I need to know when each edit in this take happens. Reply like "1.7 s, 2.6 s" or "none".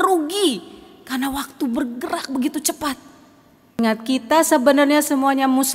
3.8 s